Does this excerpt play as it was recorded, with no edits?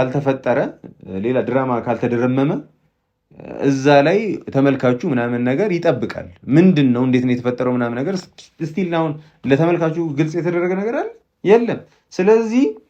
yes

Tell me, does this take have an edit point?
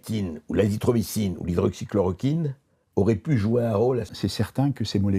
yes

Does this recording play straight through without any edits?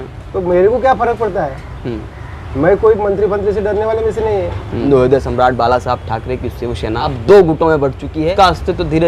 no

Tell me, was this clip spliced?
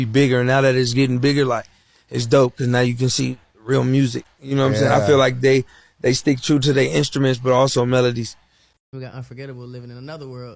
no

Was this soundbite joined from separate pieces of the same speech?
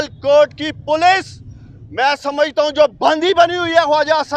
no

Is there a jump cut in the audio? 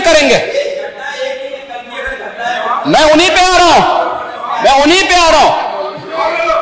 no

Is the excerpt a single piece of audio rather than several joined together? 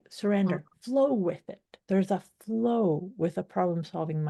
yes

